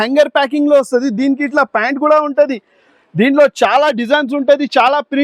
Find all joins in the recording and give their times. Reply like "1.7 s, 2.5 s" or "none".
none